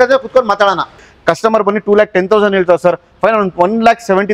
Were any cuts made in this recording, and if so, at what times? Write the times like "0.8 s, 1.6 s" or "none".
0.9 s